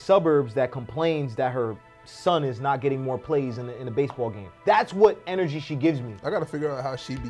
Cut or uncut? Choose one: uncut